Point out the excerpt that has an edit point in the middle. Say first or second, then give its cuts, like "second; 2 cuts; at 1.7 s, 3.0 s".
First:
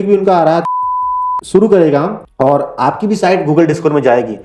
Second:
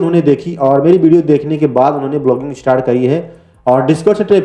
first; 1 cut; at 0.9 s